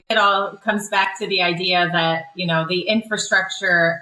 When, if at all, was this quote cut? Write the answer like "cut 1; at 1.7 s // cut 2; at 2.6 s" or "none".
none